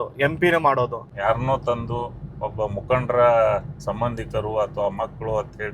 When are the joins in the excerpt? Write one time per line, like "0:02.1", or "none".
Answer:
0:01.1